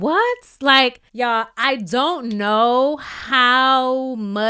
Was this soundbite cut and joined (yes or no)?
yes